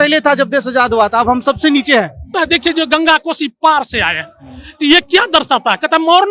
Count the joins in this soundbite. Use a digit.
1